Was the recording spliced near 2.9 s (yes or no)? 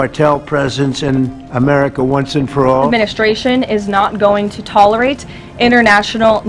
yes